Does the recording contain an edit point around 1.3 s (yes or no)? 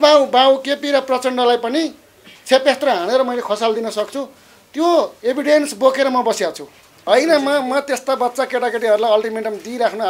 no